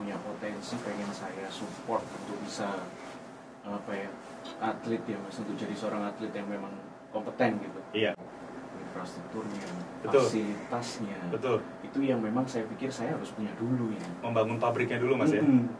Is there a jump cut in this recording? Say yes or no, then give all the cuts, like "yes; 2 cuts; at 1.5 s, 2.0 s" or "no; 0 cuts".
yes; 1 cut; at 8.2 s